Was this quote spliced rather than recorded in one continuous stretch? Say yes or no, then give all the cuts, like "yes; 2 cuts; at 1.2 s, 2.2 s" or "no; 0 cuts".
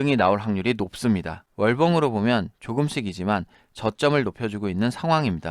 yes; 1 cut; at 1.4 s